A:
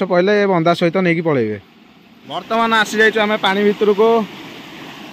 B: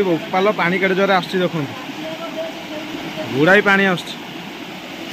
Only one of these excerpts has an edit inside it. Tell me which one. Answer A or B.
A